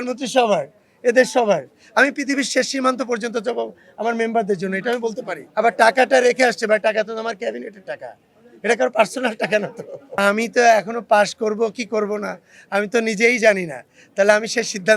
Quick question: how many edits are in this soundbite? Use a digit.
2